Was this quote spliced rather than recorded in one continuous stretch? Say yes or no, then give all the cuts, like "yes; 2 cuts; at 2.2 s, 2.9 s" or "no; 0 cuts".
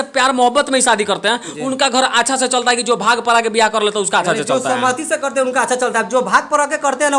no; 0 cuts